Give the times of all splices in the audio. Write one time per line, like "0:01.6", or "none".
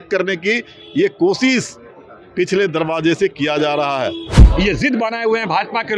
0:04.3